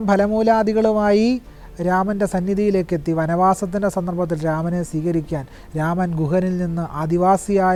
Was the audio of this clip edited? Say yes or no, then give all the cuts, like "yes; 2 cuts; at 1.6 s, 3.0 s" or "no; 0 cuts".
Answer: no; 0 cuts